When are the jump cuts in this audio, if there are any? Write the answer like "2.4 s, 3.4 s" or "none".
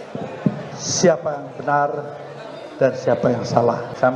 none